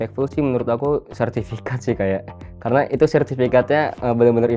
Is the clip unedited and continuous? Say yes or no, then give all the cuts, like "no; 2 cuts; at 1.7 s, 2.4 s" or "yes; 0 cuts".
yes; 0 cuts